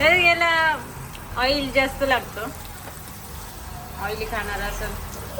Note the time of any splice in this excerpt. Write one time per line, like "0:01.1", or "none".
none